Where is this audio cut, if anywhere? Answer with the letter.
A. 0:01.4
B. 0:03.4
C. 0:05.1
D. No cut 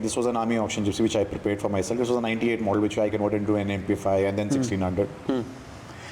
D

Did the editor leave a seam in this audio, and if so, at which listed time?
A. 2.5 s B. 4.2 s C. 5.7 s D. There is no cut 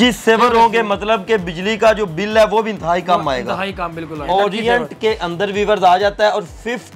B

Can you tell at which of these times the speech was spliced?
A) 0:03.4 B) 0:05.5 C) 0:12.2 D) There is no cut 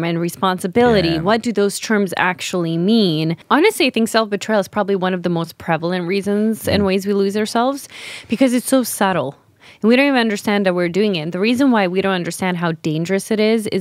A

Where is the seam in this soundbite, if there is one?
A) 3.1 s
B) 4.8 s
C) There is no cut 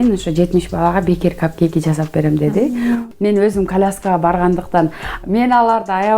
A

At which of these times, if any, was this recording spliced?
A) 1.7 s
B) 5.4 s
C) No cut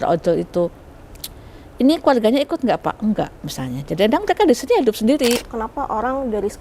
B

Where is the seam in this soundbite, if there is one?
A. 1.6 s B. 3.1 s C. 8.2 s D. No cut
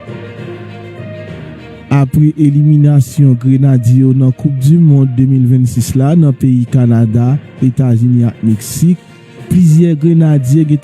A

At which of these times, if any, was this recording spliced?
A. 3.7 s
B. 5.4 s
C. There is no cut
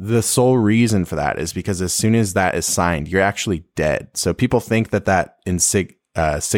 C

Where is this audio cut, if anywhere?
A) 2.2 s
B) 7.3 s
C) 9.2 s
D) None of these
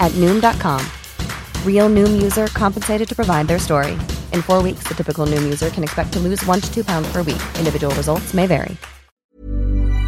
C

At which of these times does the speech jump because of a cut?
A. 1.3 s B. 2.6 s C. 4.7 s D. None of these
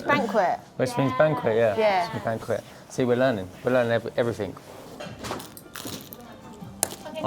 C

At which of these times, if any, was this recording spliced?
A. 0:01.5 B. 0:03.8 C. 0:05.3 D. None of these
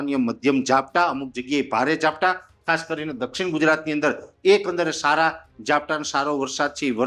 D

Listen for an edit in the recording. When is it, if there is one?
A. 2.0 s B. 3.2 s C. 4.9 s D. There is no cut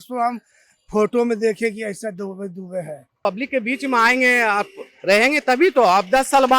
B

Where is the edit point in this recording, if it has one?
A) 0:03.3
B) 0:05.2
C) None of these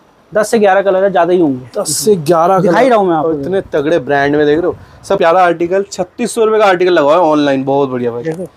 B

